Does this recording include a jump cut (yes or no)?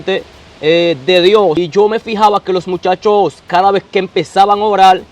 yes